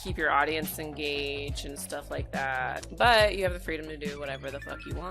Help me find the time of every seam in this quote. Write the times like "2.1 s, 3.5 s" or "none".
2.9 s

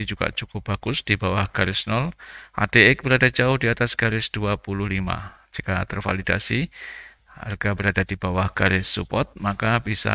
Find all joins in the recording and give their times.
none

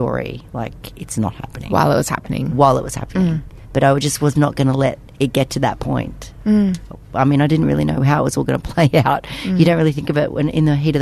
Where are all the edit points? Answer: none

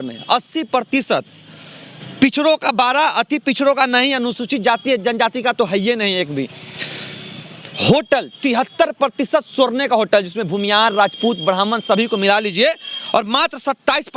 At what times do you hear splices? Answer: none

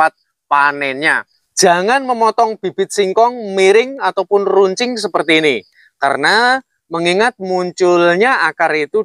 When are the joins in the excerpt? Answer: 1.2 s

